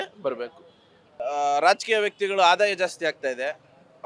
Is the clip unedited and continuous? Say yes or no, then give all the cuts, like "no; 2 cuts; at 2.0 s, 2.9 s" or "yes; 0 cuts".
no; 1 cut; at 1.2 s